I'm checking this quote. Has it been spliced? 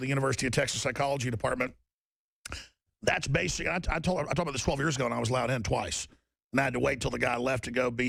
no; 0 cuts

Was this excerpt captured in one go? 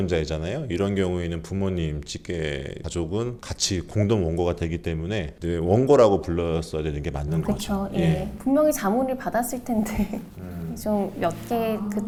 yes; 0 cuts

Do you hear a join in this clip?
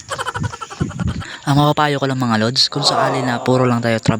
no; 0 cuts

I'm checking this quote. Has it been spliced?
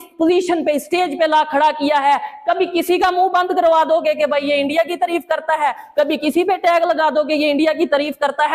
no; 0 cuts

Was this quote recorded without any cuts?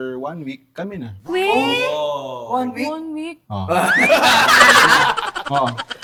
yes; 0 cuts

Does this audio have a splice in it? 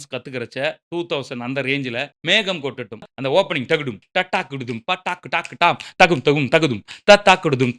yes; 1 cut; at 3.0 s

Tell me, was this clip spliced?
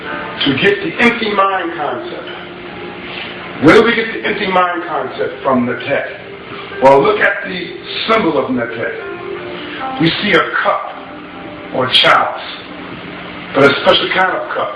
no; 0 cuts

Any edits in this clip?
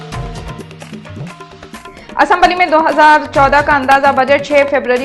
no; 0 cuts

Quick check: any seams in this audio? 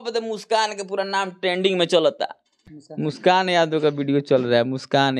yes; 1 cut; at 2.7 s

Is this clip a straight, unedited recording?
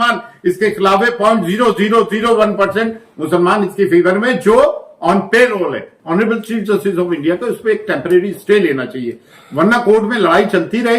no; 1 cut; at 5.9 s

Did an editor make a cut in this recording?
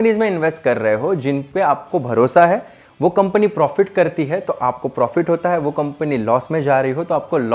no; 0 cuts

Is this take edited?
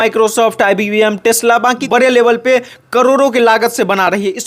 yes; 1 cut; at 1.8 s

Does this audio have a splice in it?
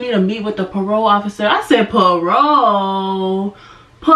no; 0 cuts

